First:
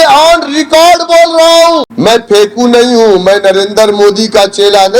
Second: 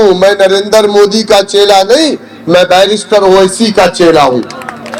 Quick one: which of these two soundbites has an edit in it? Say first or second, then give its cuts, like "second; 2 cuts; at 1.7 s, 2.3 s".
first; 1 cut; at 1.9 s